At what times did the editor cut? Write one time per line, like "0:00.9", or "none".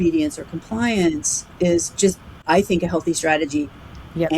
0:02.3